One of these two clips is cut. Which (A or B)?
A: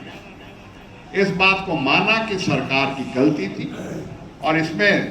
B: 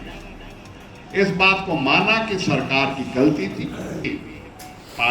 B